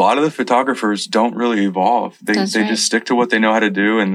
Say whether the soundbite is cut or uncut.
uncut